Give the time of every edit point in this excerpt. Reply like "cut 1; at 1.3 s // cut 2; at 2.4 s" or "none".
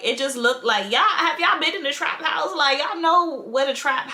none